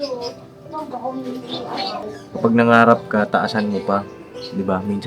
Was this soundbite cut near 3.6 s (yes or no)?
no